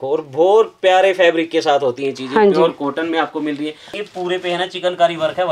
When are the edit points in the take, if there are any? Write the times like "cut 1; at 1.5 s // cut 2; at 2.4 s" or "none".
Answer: cut 1; at 3.9 s